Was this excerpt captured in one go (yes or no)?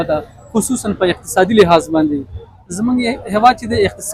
yes